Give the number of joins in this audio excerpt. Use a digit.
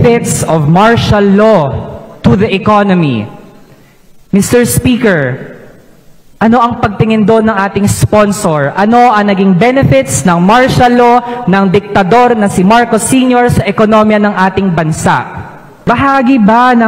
1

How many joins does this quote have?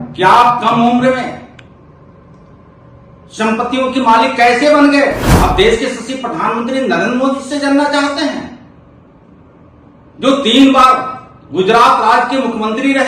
1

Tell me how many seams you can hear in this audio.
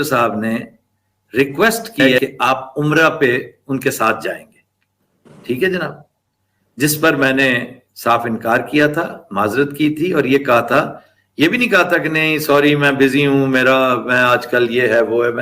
1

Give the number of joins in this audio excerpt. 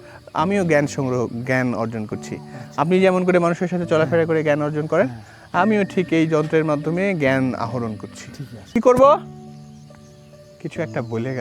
3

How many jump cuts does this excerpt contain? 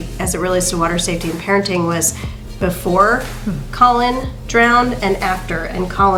0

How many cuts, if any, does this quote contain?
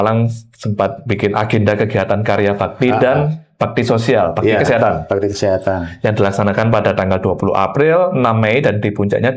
0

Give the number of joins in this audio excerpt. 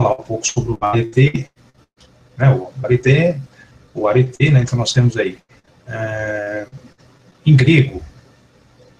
1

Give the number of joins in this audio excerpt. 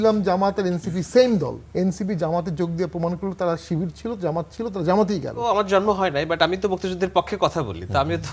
2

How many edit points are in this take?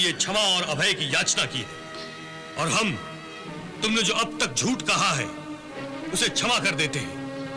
0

